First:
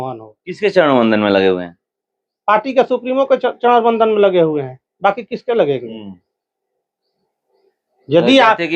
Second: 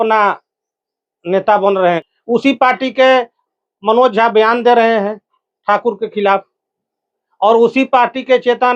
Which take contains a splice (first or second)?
second